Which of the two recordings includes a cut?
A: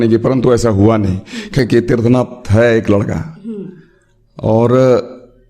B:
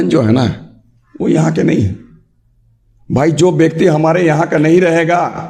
A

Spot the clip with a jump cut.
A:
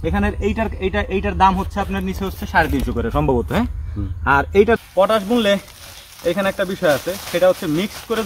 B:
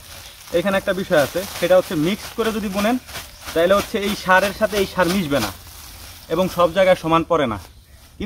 A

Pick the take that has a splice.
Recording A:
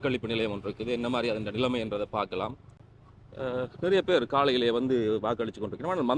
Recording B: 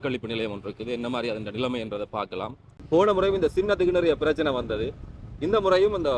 B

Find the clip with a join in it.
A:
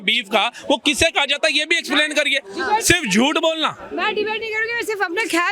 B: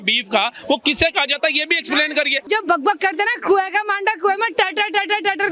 B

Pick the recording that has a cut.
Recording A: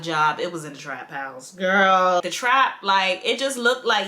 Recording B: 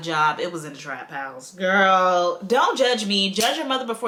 A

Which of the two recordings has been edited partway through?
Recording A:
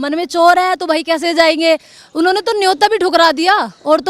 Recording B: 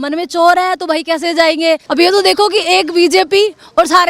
B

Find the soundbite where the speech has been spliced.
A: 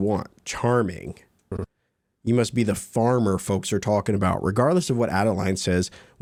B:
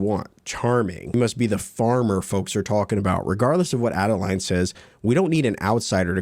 B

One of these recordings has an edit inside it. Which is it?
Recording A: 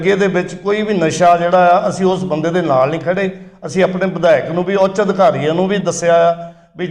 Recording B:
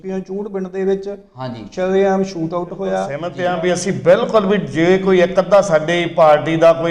B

